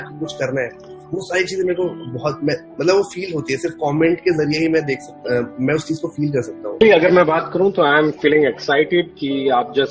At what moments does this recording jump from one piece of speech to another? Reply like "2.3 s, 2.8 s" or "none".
6.8 s